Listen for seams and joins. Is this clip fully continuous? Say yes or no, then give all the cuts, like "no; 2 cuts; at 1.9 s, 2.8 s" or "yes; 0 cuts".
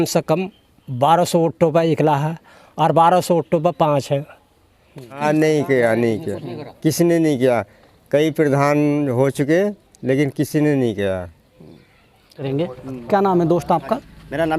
no; 2 cuts; at 5.1 s, 12.5 s